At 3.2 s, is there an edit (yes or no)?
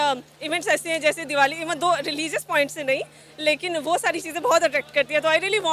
no